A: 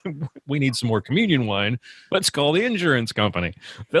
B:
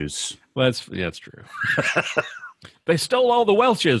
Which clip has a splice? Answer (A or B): A